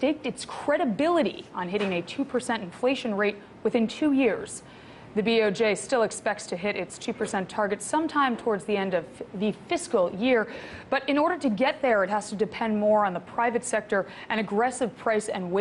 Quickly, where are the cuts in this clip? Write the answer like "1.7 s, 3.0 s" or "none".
3.0 s

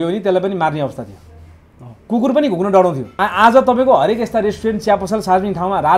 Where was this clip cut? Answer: 3.2 s

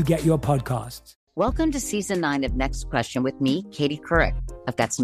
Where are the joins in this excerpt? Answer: 1.1 s

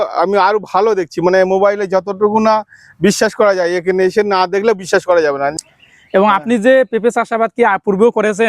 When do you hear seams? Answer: 5.5 s

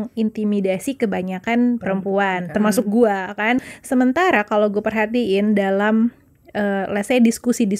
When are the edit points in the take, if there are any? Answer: 3.6 s

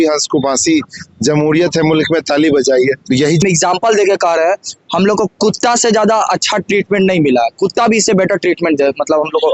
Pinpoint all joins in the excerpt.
3.4 s

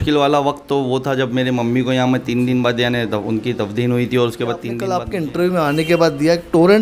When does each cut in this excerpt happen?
4.8 s

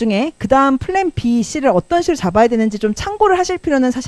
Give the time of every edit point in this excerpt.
none

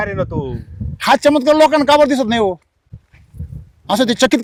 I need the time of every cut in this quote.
none

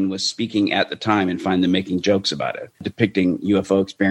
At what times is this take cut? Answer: 2.9 s

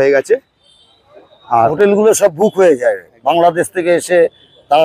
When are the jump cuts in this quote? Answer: 1.7 s

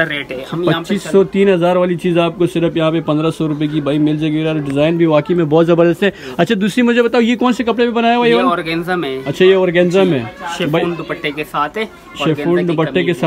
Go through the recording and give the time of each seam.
none

